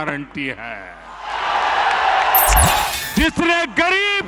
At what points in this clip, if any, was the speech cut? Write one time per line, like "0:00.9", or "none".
0:02.9